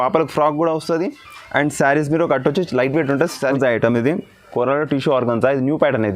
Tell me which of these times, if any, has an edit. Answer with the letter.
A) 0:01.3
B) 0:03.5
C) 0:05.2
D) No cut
B